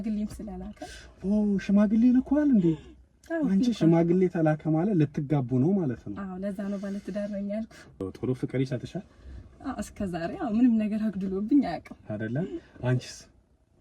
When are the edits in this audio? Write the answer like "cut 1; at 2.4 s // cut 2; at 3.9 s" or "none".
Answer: cut 1; at 8.0 s